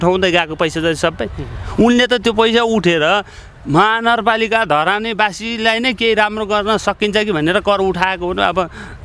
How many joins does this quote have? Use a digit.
0